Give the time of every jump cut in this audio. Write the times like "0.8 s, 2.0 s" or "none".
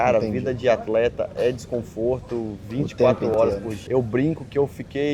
3.8 s